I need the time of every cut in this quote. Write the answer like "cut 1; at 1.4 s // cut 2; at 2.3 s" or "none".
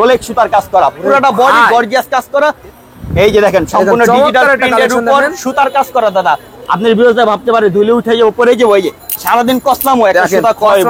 cut 1; at 2.6 s